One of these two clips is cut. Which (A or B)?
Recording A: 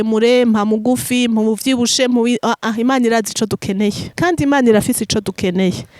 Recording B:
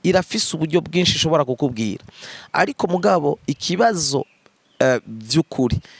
A